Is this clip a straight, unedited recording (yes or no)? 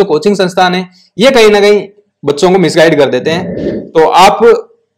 no